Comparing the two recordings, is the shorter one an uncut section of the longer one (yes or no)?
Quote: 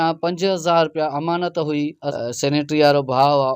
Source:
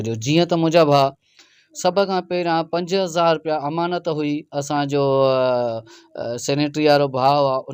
no